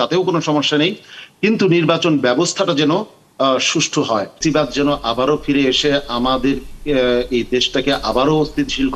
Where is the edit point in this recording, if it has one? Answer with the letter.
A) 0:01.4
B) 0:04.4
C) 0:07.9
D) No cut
B